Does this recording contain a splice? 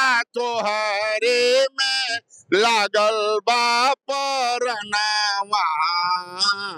no; 0 cuts

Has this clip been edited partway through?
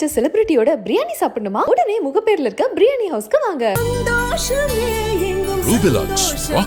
no; 0 cuts

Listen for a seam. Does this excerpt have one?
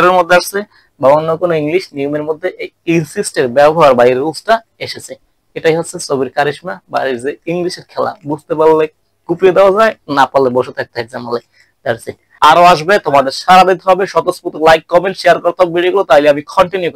yes; 1 cut; at 12.3 s

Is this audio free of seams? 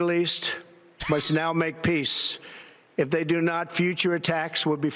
yes; 0 cuts

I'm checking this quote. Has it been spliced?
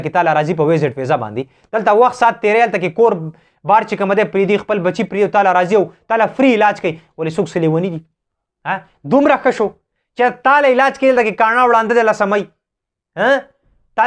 no; 0 cuts

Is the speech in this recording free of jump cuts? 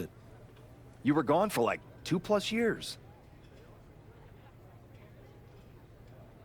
no; 1 cut; at 2.8 s

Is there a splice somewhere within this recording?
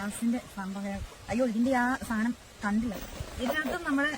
no; 0 cuts

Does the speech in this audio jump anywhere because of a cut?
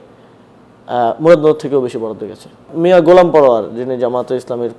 yes; 1 cut; at 2.7 s

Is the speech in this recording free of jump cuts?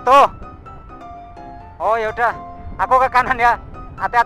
yes; 0 cuts

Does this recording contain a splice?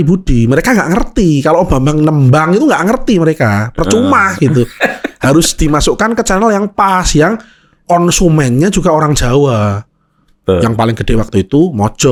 no; 0 cuts

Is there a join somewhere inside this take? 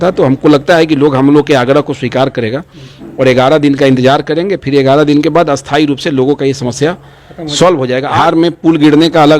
yes; 1 cut; at 8.2 s

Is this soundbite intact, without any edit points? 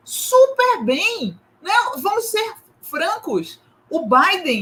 yes; 0 cuts

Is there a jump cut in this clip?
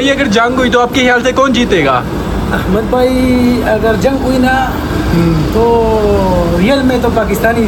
no; 0 cuts

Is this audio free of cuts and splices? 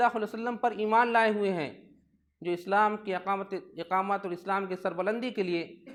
yes; 0 cuts

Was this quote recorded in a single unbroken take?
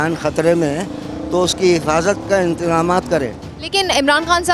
yes; 0 cuts

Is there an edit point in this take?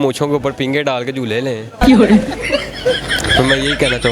no; 0 cuts

